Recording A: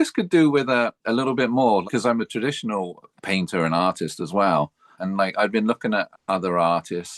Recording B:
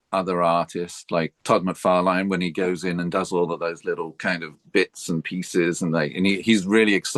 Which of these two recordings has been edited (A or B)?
A